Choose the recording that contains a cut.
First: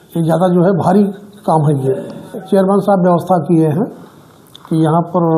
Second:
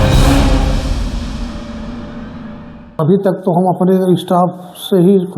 second; 1 cut; at 2.8 s

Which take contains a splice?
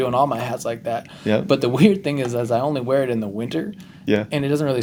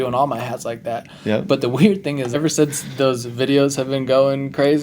second; 1 cut; at 2.4 s

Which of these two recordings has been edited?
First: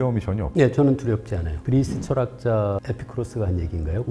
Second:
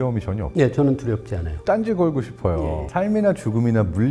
second; 2 cuts; at 1.5 s, 2.5 s

